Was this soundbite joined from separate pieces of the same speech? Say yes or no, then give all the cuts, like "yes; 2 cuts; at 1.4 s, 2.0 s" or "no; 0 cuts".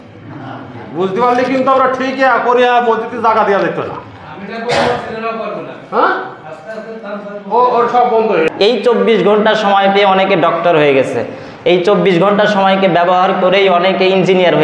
yes; 1 cut; at 8.5 s